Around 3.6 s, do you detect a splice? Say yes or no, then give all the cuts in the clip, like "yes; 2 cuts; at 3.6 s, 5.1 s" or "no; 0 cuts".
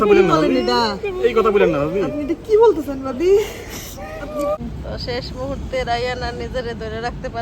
no; 1 cut; at 4.9 s